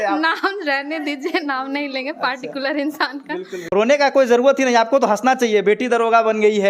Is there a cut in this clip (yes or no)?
yes